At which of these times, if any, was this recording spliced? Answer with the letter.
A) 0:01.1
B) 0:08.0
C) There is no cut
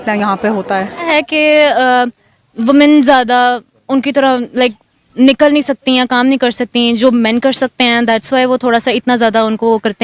A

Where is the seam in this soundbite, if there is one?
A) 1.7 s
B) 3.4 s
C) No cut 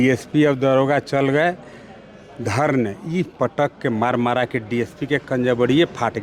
C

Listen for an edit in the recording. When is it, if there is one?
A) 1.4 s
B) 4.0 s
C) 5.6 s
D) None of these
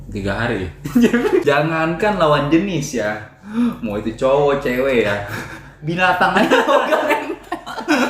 A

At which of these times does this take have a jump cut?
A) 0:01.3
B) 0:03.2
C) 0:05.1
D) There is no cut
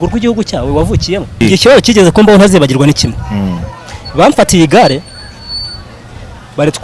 A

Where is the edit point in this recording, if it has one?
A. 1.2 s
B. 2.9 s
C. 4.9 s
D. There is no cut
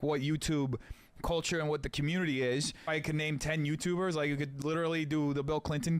B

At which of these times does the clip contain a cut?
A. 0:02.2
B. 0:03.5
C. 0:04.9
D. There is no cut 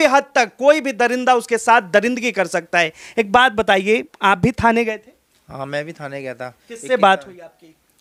D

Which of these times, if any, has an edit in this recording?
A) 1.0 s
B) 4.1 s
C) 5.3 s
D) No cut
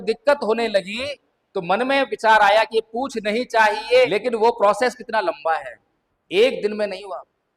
B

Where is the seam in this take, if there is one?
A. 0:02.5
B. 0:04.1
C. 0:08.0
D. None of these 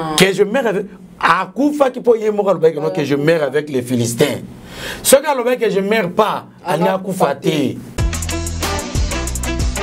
C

